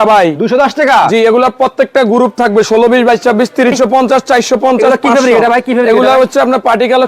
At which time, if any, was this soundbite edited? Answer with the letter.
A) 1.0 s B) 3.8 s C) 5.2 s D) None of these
B